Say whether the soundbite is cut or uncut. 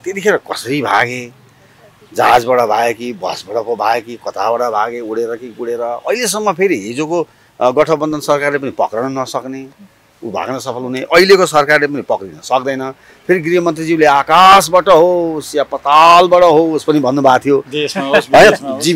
uncut